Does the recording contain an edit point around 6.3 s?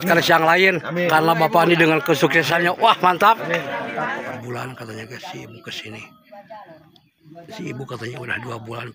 no; 1 cut; at 4.4 s

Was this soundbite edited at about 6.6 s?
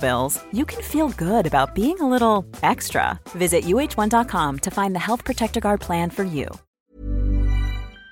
yes; 1 cut; at 6.6 s

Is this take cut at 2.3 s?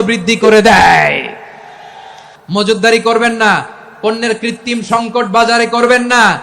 yes; 1 cut; at 2.3 s

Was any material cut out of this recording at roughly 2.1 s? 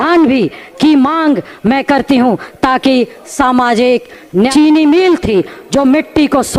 no; 1 cut; at 4.5 s

